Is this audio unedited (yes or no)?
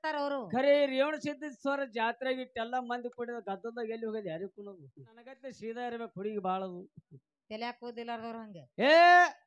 no